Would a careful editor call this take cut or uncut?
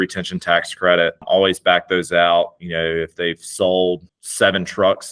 cut